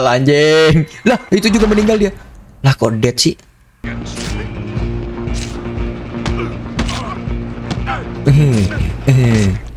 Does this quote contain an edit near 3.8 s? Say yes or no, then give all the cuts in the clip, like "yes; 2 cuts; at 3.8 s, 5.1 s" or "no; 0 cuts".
yes; 1 cut; at 3.8 s